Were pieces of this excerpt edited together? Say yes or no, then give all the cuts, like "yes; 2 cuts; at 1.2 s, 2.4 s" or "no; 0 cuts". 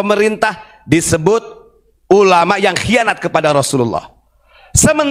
no; 0 cuts